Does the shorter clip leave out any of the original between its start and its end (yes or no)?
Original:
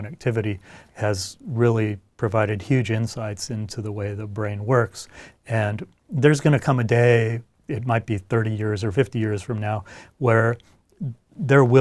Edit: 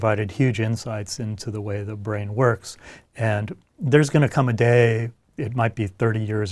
no